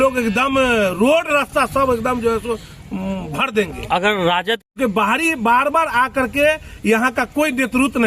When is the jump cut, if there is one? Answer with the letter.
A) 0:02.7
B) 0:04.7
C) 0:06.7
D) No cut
B